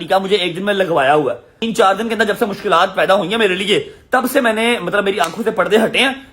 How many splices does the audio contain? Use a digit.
1